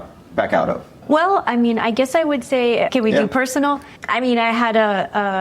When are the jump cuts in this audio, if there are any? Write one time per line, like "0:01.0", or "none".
0:00.9
0:02.9
0:03.9